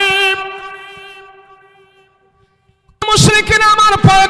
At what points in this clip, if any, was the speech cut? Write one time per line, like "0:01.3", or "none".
0:03.0